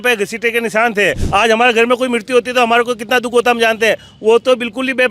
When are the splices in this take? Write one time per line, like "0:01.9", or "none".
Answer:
0:01.2